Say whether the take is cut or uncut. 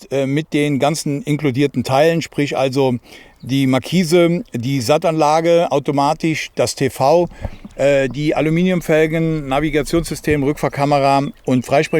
uncut